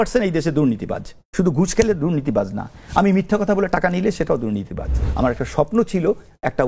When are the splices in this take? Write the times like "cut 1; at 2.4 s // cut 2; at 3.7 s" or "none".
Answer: cut 1; at 1.2 s // cut 2; at 5.0 s